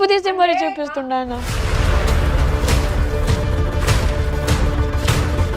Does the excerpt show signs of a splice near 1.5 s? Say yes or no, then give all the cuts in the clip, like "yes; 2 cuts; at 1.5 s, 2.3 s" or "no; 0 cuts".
yes; 1 cut; at 1.5 s